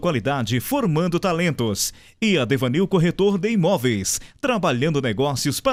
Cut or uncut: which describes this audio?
uncut